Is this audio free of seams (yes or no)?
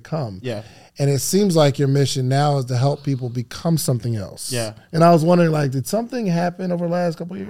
yes